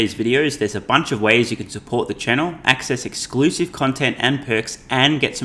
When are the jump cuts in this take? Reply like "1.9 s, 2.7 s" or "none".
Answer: none